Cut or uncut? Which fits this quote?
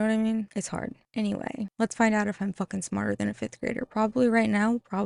uncut